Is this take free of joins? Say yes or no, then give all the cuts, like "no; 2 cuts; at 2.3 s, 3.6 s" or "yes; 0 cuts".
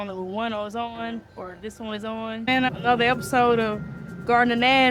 no; 1 cut; at 2.5 s